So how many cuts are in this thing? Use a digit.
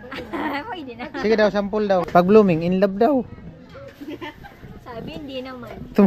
1